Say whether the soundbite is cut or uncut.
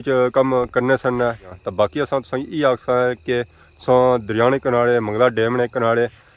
cut